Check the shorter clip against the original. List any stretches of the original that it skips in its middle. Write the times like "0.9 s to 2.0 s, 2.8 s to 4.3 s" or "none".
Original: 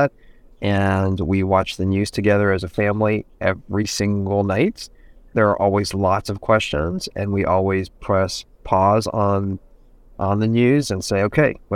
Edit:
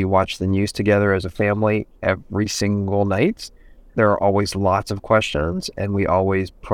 none

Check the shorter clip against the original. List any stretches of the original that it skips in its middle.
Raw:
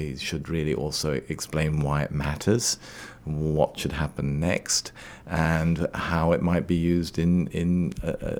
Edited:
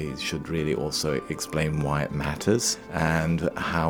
2.8 s to 5.2 s

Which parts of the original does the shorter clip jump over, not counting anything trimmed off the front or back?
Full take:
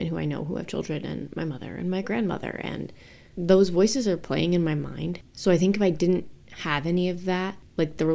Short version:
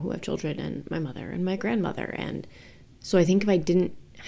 3.3 s to 5.1 s

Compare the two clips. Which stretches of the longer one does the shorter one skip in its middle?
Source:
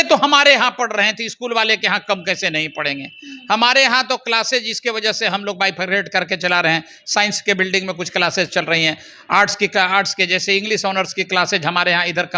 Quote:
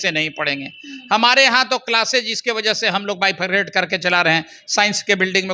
none

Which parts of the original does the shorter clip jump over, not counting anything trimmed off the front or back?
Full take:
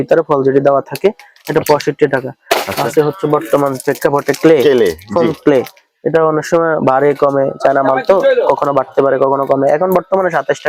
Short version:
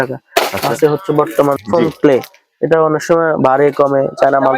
3.8 s to 5.0 s

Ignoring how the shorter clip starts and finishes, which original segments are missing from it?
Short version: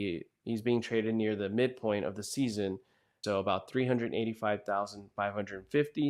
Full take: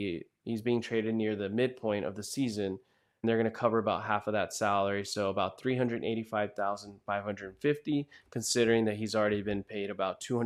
3.1 s to 5.1 s

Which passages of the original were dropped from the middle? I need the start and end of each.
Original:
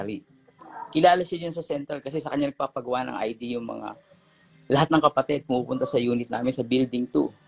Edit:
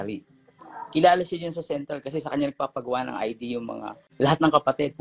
4.0 s to 4.5 s

